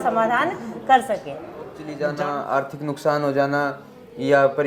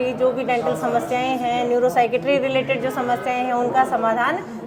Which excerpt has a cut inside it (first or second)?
first